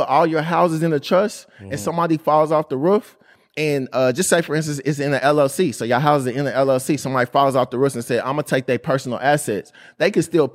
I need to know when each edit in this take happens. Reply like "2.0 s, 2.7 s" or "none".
none